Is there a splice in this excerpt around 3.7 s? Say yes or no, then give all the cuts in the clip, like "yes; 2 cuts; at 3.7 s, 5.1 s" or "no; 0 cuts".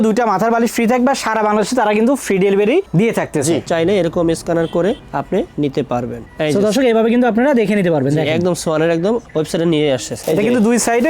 yes; 2 cuts; at 3.7 s, 10.1 s